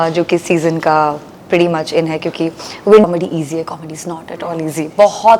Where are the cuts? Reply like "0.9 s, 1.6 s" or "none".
3.0 s